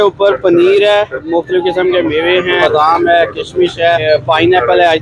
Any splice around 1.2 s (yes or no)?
yes